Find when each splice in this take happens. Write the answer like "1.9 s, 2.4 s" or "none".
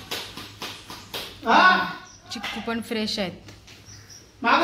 none